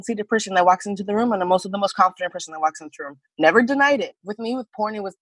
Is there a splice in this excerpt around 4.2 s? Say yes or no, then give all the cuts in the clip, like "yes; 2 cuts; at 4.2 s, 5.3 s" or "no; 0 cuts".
yes; 1 cut; at 4.2 s